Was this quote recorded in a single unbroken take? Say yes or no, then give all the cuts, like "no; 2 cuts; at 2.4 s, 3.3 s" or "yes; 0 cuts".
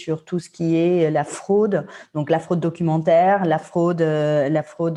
yes; 0 cuts